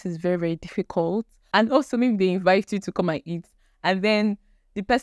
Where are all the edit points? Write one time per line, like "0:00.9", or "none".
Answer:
0:01.4